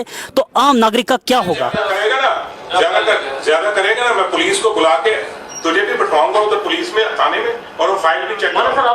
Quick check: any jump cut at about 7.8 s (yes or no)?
no